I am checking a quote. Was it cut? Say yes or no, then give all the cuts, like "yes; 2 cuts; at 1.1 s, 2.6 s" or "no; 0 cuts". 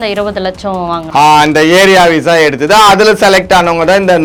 no; 0 cuts